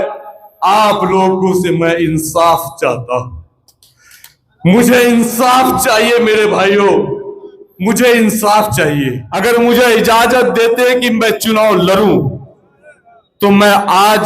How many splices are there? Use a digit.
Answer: 1